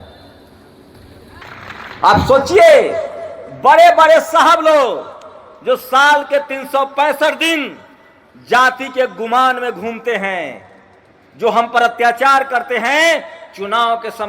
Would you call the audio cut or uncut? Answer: cut